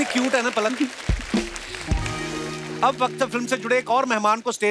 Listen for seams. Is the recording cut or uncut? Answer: uncut